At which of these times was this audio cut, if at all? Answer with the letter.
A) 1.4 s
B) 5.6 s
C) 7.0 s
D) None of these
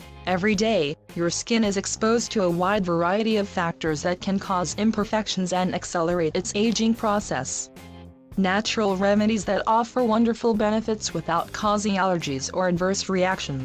C